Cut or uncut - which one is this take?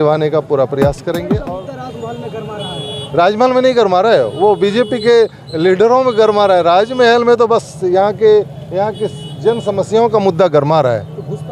cut